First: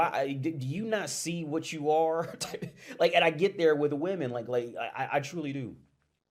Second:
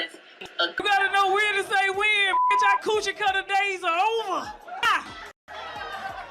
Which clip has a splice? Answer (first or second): second